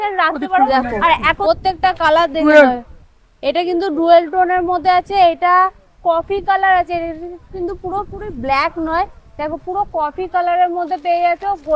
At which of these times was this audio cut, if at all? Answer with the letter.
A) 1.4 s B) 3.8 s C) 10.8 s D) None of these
A